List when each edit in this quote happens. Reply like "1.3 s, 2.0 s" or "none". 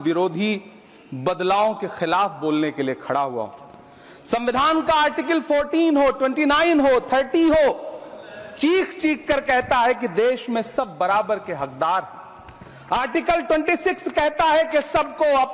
none